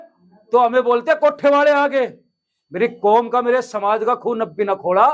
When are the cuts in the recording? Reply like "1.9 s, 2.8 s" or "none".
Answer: none